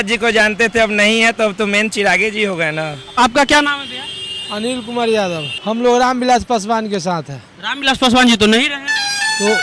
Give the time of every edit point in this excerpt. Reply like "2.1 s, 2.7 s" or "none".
3.0 s, 5.5 s

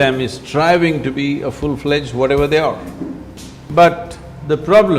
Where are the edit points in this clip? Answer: 3.5 s

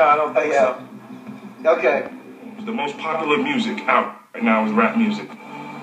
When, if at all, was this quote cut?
2.5 s

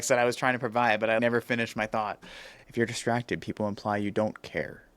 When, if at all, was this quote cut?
1.2 s, 2.5 s

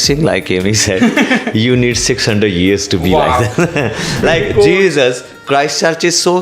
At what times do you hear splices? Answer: 4.2 s

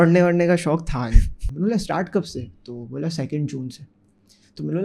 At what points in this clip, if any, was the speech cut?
1.4 s

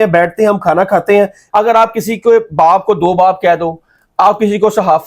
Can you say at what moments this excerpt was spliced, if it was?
1.4 s

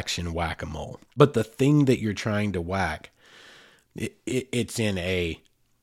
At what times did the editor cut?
1.0 s

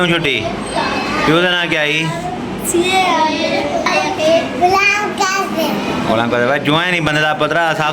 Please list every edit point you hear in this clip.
3.9 s

